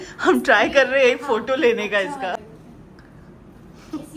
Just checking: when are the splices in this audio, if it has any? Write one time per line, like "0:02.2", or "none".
0:02.4